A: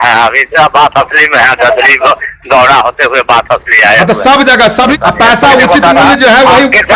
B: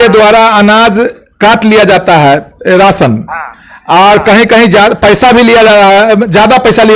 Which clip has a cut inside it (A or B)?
A